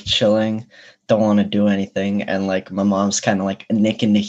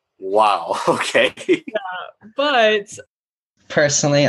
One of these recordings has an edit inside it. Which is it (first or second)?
second